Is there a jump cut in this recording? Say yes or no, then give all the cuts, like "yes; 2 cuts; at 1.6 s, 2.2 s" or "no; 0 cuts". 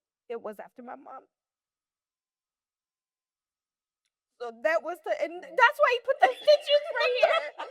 no; 0 cuts